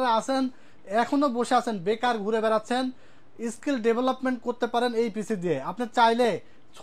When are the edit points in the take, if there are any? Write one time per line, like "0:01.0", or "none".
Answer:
none